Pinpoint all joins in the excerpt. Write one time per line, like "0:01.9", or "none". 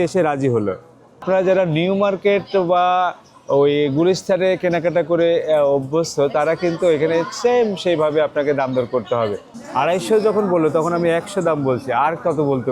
0:01.2
0:09.5